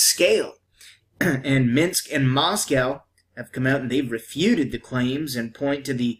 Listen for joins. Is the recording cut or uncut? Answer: cut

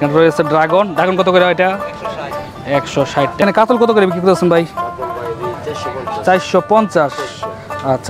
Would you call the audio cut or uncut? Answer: cut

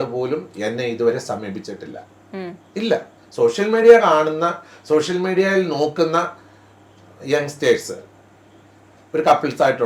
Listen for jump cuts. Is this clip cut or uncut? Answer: uncut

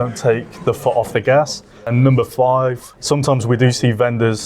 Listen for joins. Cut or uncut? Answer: cut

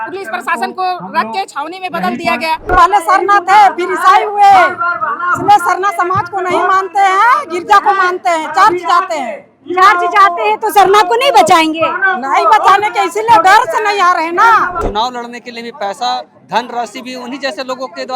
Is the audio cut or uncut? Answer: cut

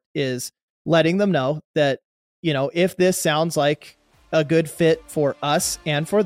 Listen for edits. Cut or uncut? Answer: uncut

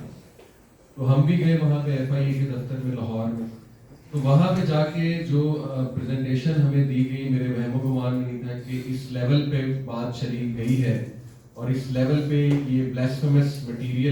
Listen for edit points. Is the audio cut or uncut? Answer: uncut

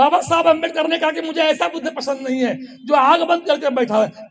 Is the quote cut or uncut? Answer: uncut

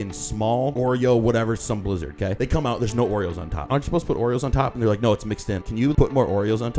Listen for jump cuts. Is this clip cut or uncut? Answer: cut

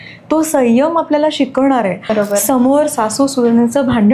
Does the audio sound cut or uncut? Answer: cut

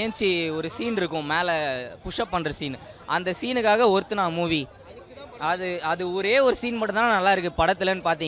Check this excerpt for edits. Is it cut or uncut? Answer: uncut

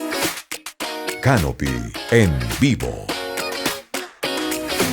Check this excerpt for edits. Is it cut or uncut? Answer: cut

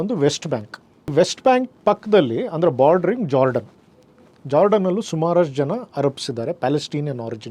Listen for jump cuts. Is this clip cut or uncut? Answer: cut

